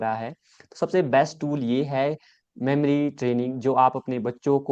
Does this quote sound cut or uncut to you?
uncut